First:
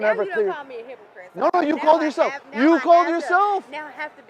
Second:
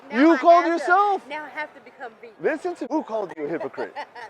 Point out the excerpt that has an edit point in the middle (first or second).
second